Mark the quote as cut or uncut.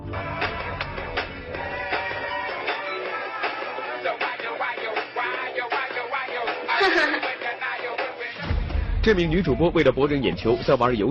cut